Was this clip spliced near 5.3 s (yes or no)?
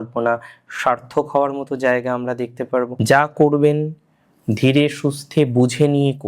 no